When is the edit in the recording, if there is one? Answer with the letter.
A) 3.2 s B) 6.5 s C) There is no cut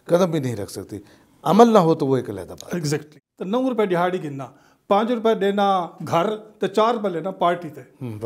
A